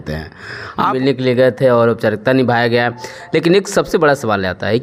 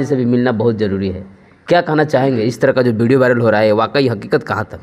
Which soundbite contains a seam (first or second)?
first